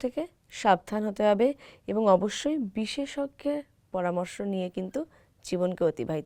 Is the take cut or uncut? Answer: uncut